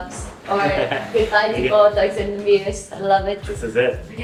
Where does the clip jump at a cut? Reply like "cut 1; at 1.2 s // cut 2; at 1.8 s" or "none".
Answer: none